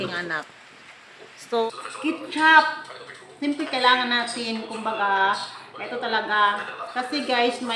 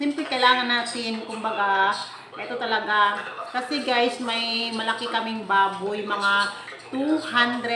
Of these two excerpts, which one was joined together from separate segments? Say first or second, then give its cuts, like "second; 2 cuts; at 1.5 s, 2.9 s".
first; 1 cut; at 1.6 s